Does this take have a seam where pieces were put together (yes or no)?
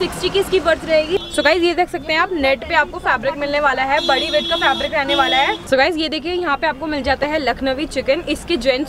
yes